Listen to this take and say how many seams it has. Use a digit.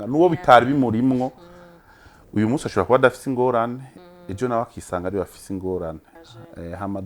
1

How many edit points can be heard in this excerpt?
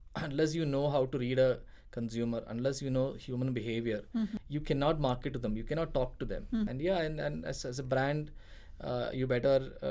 2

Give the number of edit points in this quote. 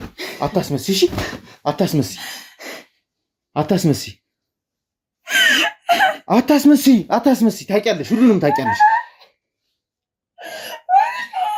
0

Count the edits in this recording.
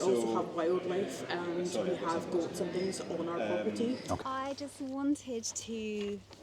1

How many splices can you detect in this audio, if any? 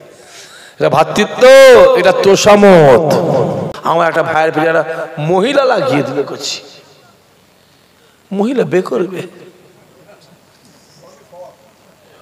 1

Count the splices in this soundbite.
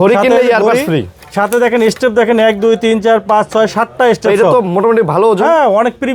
0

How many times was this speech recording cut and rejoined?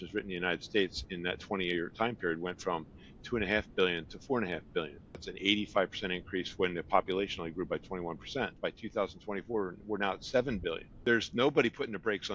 3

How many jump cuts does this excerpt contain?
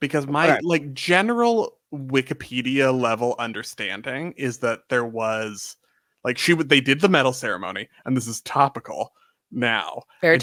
0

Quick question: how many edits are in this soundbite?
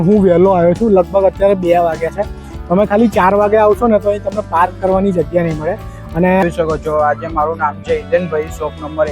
1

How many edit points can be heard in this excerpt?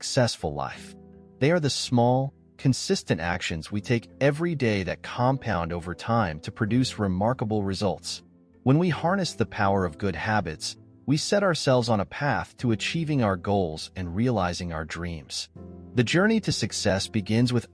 1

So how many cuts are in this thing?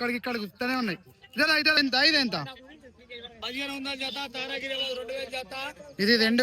1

